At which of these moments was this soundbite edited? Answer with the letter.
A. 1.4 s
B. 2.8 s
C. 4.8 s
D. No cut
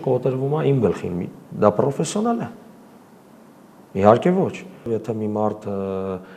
C